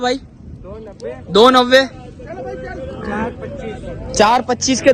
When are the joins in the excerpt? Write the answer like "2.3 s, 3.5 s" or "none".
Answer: none